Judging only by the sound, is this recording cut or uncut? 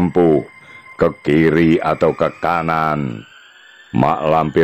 uncut